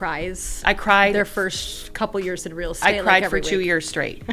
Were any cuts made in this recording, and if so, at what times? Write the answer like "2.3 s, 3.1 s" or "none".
none